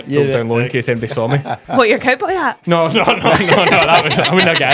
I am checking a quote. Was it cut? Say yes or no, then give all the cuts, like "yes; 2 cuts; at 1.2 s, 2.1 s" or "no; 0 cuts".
no; 0 cuts